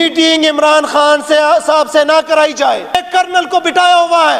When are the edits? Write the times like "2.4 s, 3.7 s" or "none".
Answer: 3.0 s

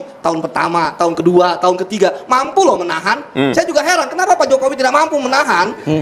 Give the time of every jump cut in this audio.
none

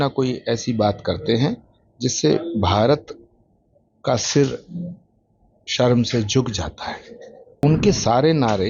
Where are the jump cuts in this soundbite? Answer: 7.6 s

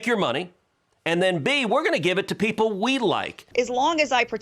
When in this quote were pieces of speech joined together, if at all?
3.4 s

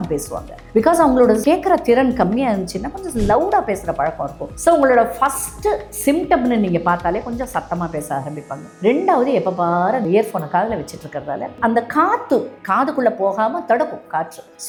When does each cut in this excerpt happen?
none

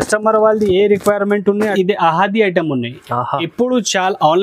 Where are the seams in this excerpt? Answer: 1.7 s

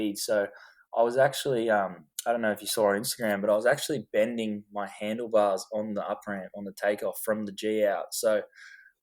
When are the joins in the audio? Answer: none

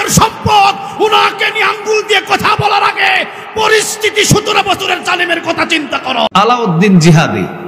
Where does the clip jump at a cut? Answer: 6.3 s

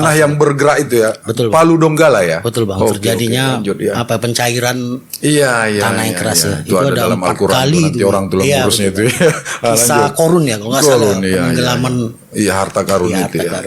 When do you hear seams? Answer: none

